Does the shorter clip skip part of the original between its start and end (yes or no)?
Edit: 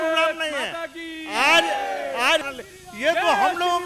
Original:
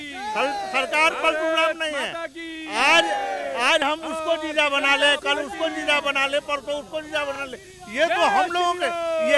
yes